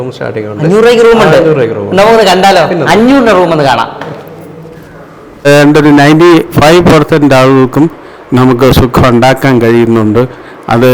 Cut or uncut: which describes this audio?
cut